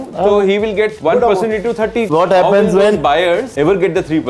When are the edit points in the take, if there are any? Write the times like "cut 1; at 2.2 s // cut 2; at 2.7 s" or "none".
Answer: cut 1; at 1.0 s // cut 2; at 2.1 s // cut 3; at 3.5 s

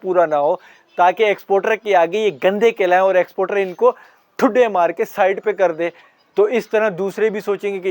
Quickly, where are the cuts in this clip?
none

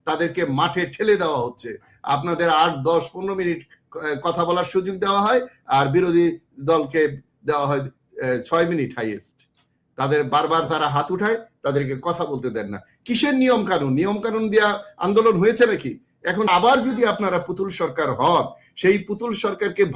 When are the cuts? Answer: cut 1; at 16.5 s

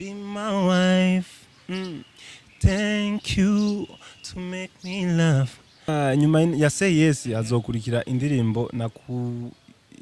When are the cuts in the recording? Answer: cut 1; at 5.9 s

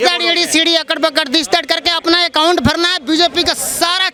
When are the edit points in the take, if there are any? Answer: none

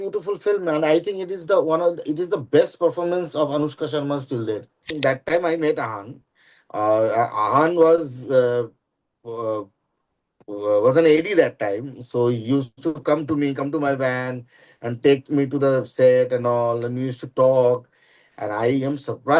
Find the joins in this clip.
cut 1; at 4.9 s

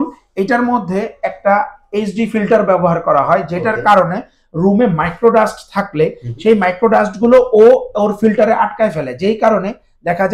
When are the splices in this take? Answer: none

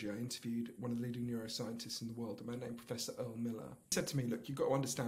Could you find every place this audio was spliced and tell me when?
cut 1; at 3.9 s

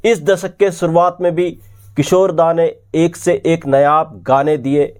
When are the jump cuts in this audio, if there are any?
none

